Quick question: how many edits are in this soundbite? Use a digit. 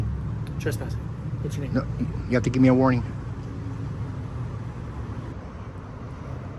2